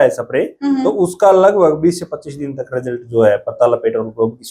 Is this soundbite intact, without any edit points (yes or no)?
yes